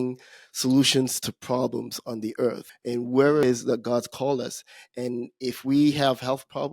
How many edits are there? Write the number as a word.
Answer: two